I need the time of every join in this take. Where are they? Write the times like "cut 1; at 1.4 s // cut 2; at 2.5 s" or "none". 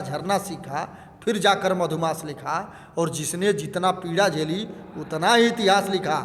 none